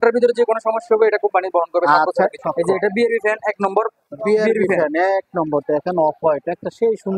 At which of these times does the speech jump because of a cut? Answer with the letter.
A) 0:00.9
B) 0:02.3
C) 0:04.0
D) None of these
B